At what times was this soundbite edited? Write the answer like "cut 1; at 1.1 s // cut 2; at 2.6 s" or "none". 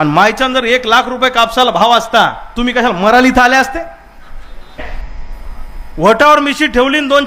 cut 1; at 4.9 s